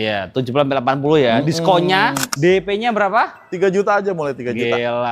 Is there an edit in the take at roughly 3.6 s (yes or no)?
no